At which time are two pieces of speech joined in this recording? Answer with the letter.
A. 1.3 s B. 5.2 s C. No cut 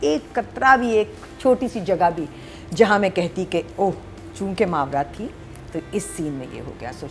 C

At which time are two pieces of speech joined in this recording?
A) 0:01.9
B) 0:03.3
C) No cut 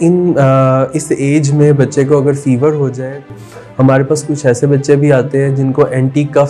B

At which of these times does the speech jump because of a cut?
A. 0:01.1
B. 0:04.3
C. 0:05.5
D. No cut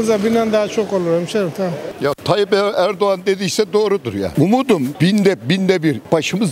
D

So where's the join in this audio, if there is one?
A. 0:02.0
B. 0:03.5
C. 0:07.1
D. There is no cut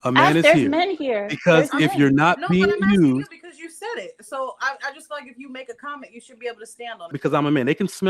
C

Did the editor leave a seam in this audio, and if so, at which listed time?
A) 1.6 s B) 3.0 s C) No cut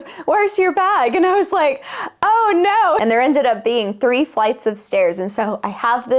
B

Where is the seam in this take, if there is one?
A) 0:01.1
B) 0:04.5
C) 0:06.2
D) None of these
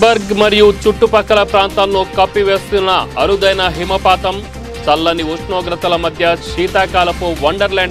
D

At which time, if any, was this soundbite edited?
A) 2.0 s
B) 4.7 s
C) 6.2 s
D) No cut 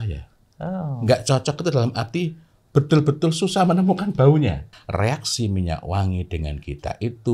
B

